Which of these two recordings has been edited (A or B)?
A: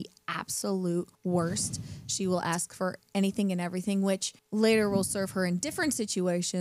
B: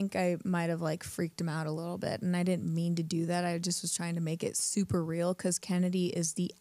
A